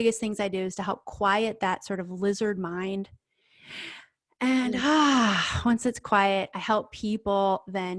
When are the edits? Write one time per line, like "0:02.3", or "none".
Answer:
none